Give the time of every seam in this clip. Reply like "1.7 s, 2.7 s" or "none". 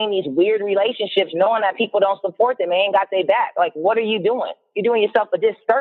none